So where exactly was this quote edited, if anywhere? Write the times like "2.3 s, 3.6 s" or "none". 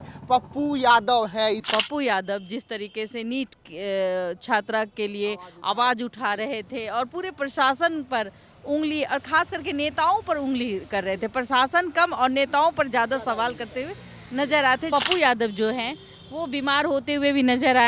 1.6 s, 14.9 s